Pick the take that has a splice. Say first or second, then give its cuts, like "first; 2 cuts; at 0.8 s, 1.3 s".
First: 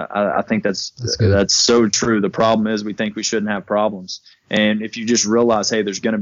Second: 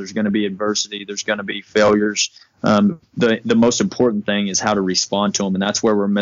second; 1 cut; at 3.1 s